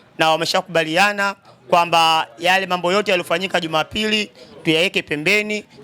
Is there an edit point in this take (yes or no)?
no